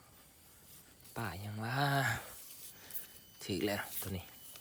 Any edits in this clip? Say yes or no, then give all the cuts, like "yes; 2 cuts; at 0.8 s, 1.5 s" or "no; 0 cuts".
no; 0 cuts